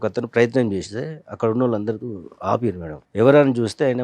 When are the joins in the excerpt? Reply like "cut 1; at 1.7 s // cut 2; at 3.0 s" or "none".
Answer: cut 1; at 2.9 s